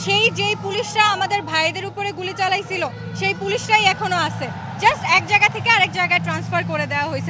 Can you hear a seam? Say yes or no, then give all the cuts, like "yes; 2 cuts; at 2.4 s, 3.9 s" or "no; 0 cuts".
no; 0 cuts